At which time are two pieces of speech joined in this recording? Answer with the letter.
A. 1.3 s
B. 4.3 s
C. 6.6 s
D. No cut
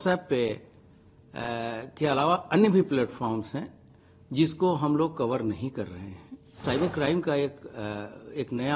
C